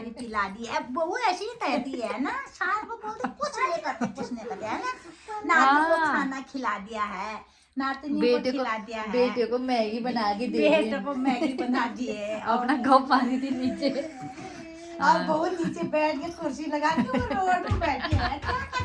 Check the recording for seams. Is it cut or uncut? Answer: uncut